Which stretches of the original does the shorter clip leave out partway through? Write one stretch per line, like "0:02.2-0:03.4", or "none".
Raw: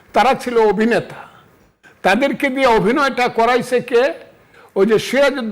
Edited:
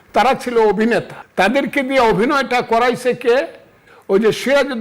0:01.2-0:01.8